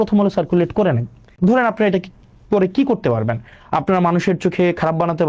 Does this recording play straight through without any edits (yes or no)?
no